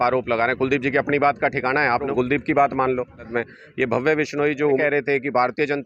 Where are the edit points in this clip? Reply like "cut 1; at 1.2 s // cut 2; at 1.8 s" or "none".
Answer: cut 1; at 2.1 s // cut 2; at 3.3 s // cut 3; at 4.8 s